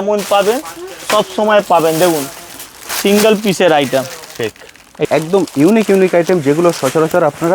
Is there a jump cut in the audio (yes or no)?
yes